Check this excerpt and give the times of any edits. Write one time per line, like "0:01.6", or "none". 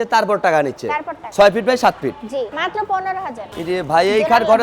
0:01.2
0:02.5
0:03.6